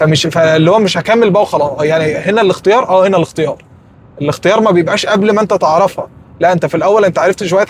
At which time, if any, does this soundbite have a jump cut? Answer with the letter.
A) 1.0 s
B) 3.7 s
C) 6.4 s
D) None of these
D